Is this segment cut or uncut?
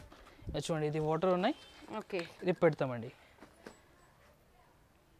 uncut